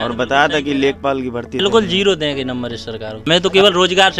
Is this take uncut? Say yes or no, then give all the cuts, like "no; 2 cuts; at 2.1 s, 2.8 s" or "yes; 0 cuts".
no; 2 cuts; at 1.6 s, 3.2 s